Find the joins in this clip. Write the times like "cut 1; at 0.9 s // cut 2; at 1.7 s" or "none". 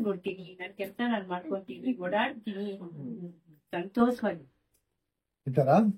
none